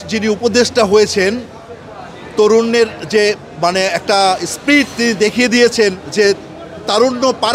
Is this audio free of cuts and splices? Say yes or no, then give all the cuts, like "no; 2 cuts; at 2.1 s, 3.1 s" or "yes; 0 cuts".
yes; 0 cuts